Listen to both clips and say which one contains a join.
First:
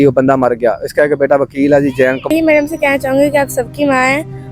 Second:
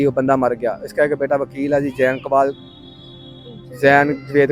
first; 1 cut; at 2.3 s

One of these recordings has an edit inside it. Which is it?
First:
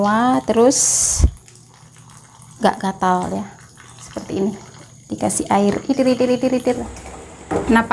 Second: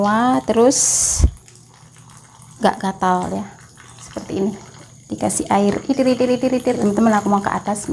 first; 1 cut; at 6.8 s

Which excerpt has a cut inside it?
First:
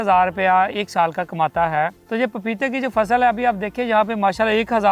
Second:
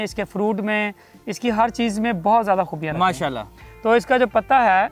first; 1 cut; at 2.0 s

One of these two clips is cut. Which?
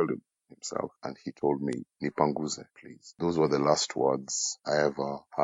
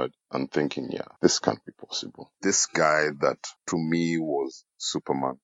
second; 3 cuts; at 1.0 s, 2.3 s, 3.5 s

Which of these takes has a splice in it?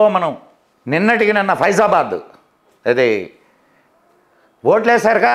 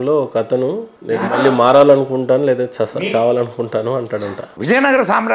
second; 2 cuts; at 0.9 s, 4.5 s

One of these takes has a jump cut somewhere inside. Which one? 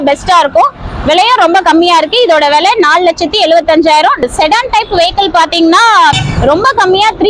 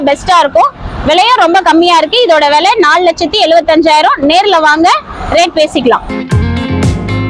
first; 2 cuts; at 4.2 s, 6.2 s

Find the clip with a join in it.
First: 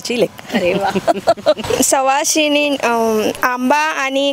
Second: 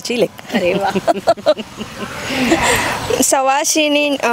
first; 1 cut; at 1.6 s

